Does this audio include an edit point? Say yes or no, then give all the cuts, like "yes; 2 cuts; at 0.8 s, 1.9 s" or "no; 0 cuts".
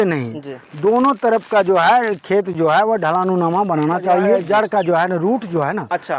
yes; 1 cut; at 4.4 s